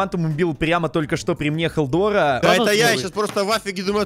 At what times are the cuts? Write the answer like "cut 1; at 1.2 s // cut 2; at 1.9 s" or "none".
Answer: cut 1; at 2.4 s